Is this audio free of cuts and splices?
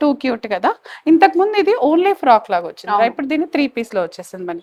yes; 0 cuts

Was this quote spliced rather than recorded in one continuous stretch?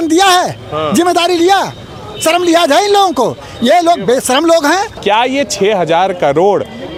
no; 0 cuts

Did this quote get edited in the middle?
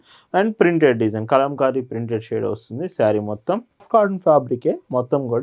yes; 1 cut; at 3.8 s

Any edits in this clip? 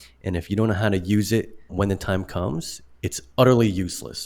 yes; 1 cut; at 1.7 s

